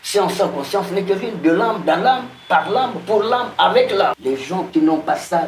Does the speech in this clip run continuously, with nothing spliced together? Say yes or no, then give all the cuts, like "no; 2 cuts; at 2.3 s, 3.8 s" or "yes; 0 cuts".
no; 1 cut; at 4.2 s